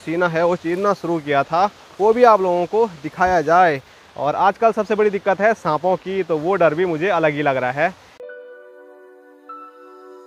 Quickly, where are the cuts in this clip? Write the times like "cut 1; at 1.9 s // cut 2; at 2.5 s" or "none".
none